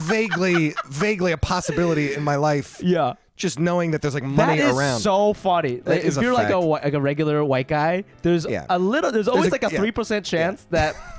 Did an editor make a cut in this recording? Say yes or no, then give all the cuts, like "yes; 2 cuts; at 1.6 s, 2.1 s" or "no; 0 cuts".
no; 0 cuts